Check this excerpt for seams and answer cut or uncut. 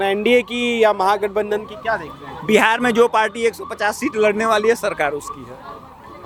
uncut